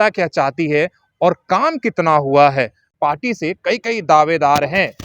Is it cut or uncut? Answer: cut